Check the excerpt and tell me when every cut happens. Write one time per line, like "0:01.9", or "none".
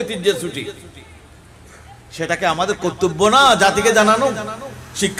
none